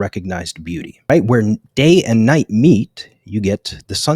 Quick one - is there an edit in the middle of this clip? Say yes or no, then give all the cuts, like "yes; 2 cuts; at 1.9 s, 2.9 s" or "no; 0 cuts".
yes; 1 cut; at 1.1 s